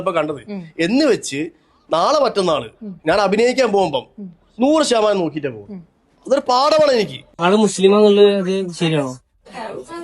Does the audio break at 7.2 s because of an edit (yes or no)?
yes